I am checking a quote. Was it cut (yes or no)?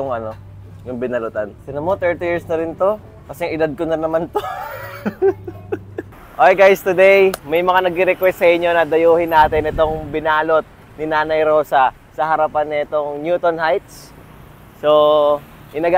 yes